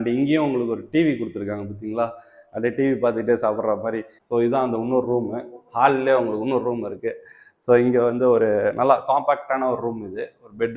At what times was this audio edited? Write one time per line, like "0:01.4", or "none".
0:04.1